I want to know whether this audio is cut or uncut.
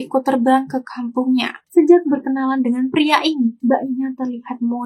cut